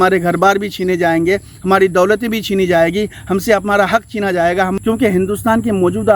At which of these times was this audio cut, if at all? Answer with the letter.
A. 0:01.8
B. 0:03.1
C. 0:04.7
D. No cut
C